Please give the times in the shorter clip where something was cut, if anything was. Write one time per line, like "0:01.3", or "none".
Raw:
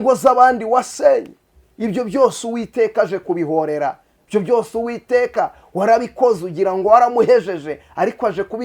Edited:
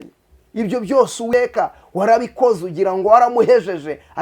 0:01.3

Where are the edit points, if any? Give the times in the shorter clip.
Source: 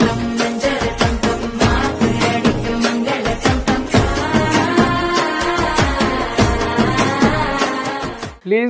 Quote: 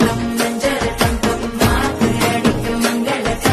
none

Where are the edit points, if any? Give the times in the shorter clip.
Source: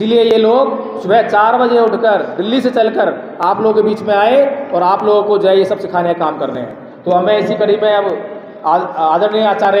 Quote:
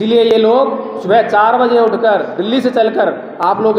none

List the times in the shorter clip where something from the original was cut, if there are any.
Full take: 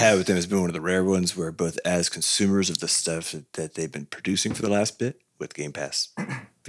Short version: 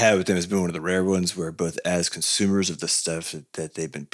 none

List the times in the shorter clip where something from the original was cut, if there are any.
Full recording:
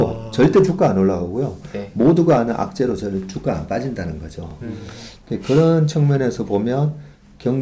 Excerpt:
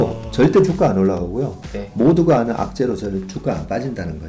none

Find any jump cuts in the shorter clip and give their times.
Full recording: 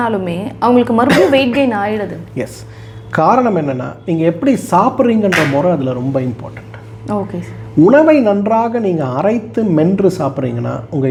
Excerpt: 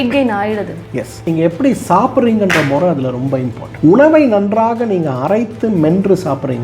0:01.1
0:03.6

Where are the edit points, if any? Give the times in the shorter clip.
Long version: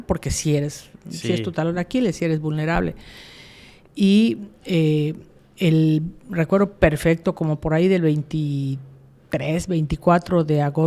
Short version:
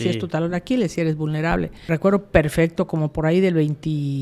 0:01.8

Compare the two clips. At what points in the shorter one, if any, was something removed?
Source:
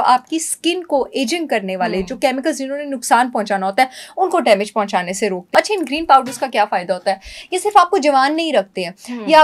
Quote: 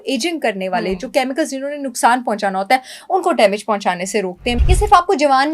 0:04.4

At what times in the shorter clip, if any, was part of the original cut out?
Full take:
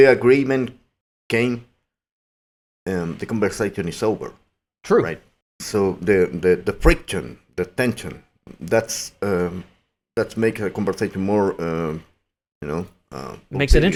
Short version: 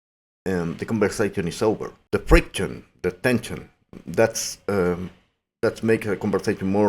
0:02.1

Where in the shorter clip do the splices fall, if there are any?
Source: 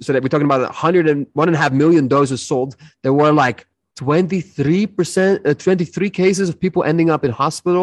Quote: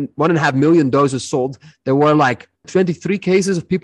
0:02.7

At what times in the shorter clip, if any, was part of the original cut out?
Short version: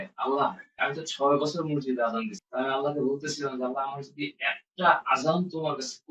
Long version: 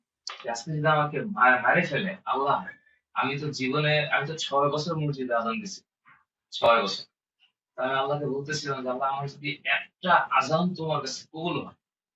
0:00.8
0:02.4

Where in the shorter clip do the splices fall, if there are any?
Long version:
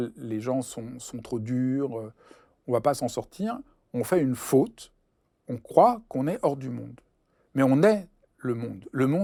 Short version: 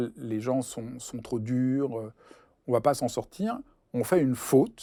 none

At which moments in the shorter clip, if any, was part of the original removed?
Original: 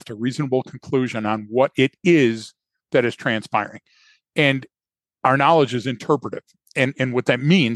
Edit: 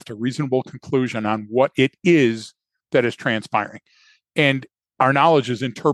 0:04.8

